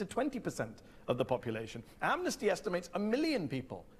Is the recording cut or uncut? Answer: cut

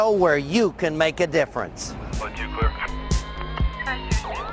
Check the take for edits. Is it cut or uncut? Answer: uncut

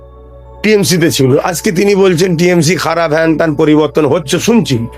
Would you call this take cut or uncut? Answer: uncut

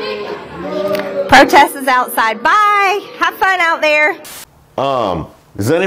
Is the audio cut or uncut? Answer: uncut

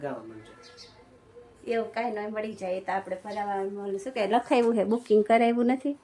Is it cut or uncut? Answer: uncut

